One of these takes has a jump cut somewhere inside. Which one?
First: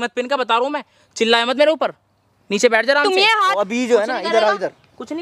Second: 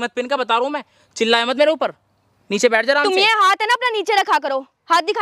first; 1 cut; at 3.5 s

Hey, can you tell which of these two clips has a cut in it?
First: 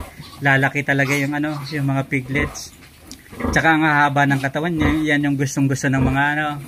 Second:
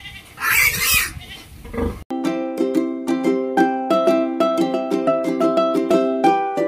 second; 1 cut; at 2.1 s

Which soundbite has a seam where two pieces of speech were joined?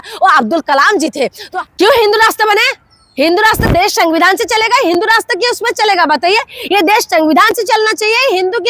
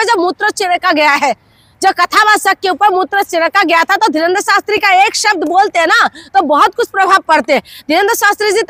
first; 1 cut; at 1.4 s

